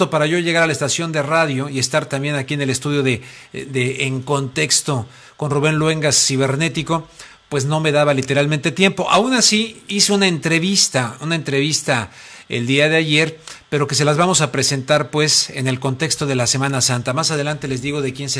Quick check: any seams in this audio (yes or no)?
yes